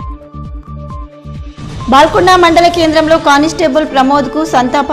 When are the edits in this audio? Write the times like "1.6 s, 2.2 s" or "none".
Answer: 1.4 s